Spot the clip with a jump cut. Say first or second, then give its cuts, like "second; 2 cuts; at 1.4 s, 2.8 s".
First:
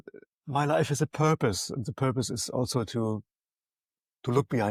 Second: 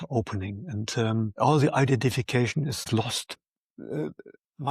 second; 2 cuts; at 1.3 s, 3.0 s